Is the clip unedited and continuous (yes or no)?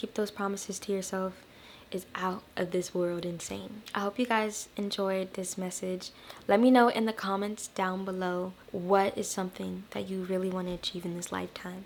yes